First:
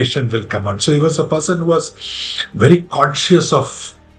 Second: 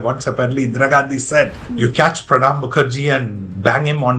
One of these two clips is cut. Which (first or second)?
second